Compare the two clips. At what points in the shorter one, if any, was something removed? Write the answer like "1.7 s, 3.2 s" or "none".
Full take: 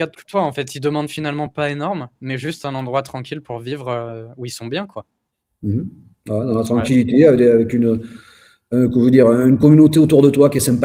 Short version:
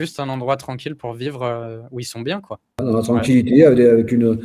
2.8 s